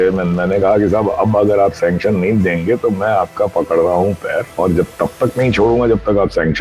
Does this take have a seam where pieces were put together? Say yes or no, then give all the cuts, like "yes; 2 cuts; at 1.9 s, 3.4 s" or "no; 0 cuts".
yes; 1 cut; at 4.5 s